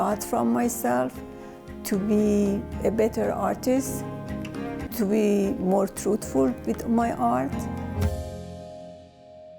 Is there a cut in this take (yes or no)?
yes